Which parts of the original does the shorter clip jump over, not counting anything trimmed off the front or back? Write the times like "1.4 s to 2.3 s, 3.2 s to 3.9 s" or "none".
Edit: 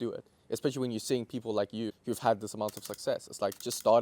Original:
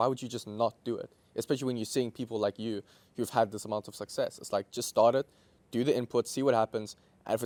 2.8 s to 3.1 s